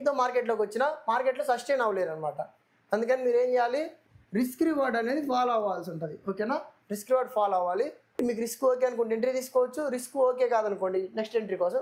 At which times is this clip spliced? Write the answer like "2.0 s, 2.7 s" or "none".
none

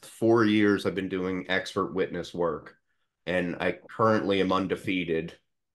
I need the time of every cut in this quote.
none

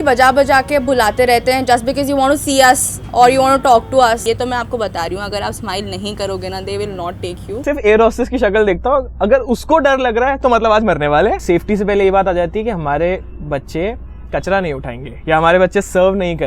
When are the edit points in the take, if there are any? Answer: 4.2 s, 7.6 s, 11.4 s

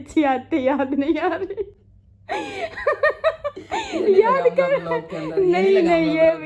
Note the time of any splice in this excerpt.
none

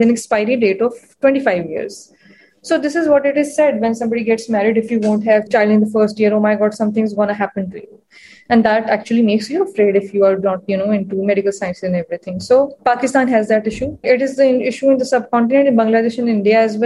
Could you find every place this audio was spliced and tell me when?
5.5 s, 12.8 s, 14.0 s

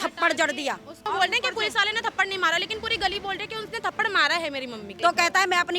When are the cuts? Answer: 1.1 s, 4.9 s

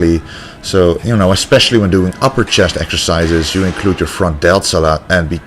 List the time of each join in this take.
1.2 s

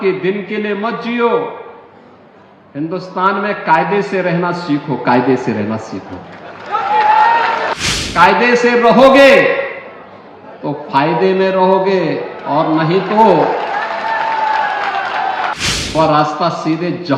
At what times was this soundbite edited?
7.8 s, 15.6 s

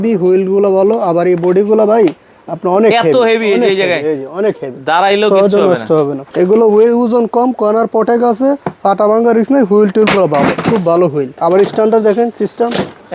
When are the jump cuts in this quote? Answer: 6.2 s, 11.3 s

